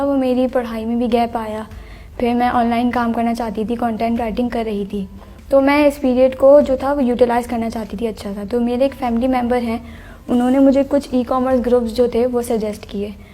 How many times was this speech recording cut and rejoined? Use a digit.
0